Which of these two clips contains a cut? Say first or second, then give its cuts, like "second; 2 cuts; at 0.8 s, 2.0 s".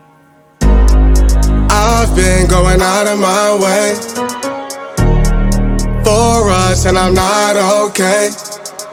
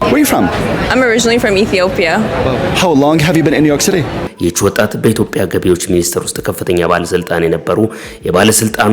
second; 1 cut; at 4.2 s